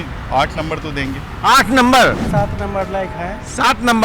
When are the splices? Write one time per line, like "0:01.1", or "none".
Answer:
0:02.3